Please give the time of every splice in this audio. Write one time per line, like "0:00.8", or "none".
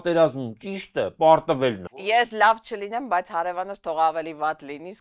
0:02.3